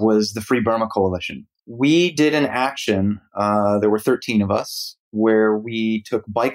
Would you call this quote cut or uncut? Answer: cut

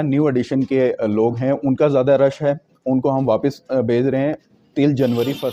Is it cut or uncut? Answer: uncut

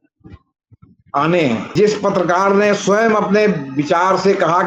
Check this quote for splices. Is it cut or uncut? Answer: cut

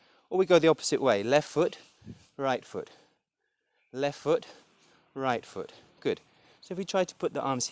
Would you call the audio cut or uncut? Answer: uncut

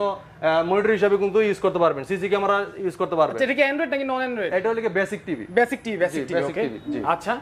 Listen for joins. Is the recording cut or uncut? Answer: uncut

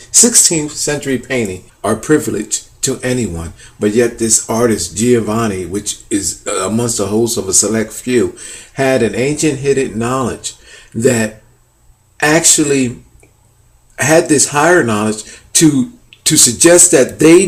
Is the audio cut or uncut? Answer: uncut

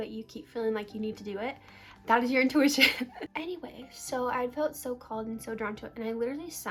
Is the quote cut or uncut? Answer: uncut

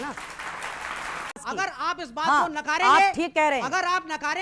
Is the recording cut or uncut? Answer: cut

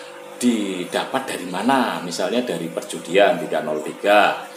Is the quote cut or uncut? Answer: uncut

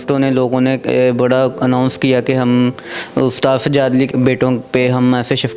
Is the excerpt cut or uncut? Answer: cut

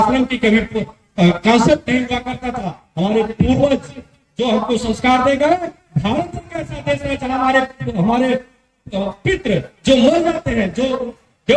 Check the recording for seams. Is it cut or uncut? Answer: uncut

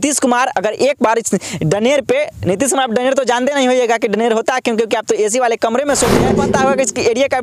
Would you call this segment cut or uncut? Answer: cut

